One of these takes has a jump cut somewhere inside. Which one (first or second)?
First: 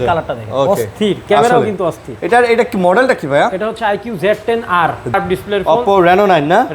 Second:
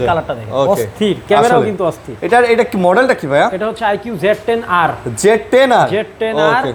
first